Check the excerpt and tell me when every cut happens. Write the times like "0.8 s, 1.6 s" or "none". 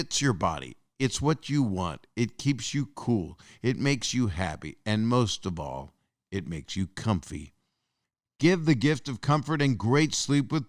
none